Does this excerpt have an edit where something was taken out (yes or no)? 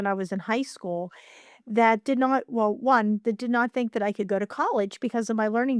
no